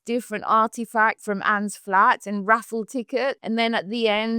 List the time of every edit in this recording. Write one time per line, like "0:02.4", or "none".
0:01.2
0:03.4